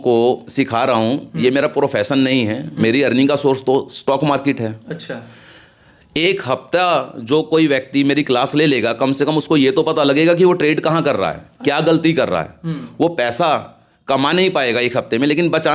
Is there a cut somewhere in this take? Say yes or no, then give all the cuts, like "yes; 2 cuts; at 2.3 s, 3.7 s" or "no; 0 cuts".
no; 0 cuts